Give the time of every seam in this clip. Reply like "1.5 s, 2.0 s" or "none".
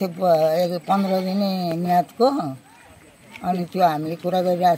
none